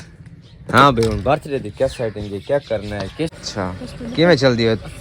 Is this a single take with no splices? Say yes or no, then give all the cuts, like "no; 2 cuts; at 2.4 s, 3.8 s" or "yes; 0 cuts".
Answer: no; 1 cut; at 3.4 s